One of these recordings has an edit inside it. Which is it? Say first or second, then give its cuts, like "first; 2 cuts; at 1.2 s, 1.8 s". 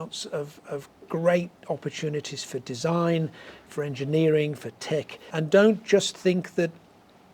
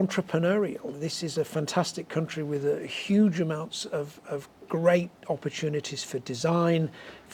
first; 1 cut; at 5.3 s